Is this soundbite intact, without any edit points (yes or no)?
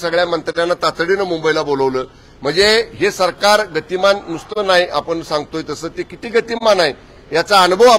yes